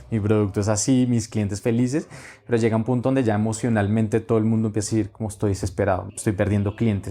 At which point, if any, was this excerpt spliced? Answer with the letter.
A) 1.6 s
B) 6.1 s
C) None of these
B